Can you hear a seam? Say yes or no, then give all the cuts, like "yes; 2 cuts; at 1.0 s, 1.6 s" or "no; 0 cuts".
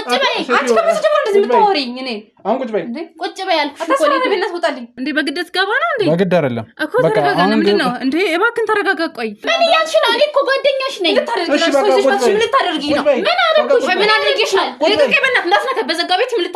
yes; 2 cuts; at 5.0 s, 9.4 s